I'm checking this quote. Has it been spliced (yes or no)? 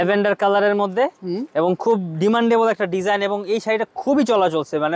no